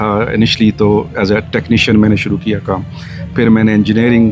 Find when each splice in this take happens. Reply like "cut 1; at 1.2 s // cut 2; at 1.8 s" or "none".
none